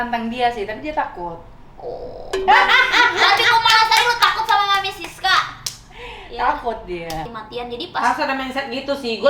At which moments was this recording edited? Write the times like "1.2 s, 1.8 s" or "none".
7.3 s